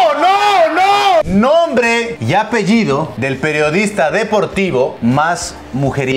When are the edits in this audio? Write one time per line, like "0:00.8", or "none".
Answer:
0:01.3
0:02.2
0:03.1
0:05.0

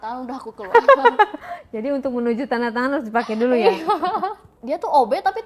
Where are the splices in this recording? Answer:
0:04.5

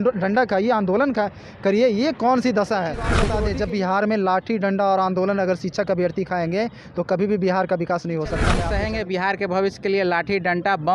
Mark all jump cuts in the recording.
0:03.2
0:08.6

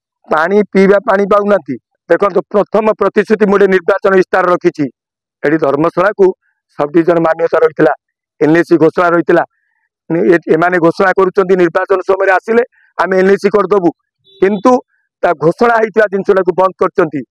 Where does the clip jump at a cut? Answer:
0:01.9

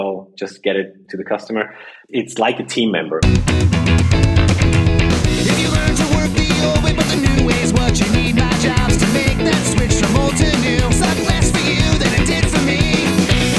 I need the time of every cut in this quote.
0:02.0
0:03.2

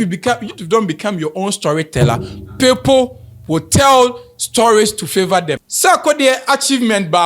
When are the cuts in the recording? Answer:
0:05.6

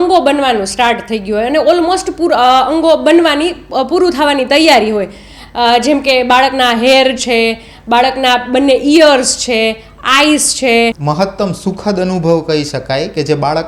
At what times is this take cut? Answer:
0:11.0

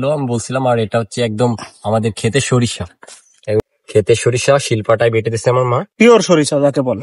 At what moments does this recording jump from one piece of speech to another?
0:03.7

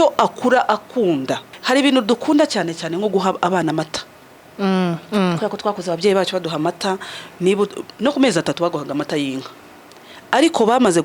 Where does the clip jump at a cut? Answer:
0:01.5

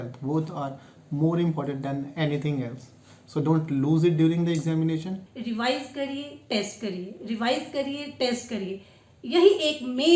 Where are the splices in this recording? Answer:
0:05.3

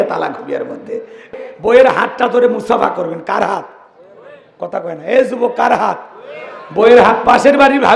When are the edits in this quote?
0:01.4

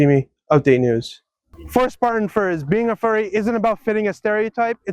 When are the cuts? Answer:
0:01.3

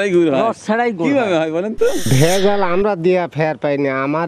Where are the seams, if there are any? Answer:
0:02.1

